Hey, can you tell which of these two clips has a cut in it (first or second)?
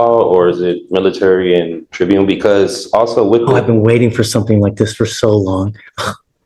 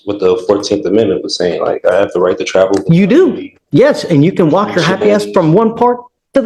first